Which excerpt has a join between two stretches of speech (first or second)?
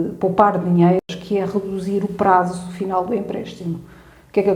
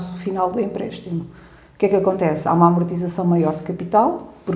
first